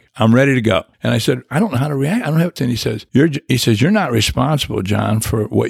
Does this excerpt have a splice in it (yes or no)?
yes